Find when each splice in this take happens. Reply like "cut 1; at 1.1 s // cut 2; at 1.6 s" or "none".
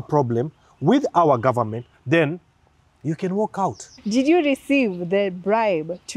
cut 1; at 1.9 s // cut 2; at 3.9 s

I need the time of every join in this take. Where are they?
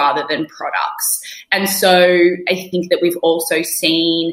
cut 1; at 2.7 s

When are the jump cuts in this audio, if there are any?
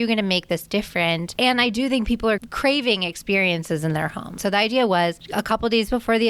cut 1; at 1.3 s // cut 2; at 2.5 s // cut 3; at 4.4 s // cut 4; at 5.2 s

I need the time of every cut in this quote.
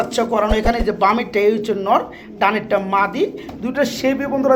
none

